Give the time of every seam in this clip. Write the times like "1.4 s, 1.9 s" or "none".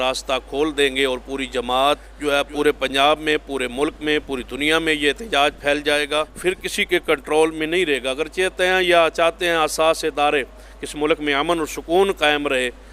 2.1 s, 6.3 s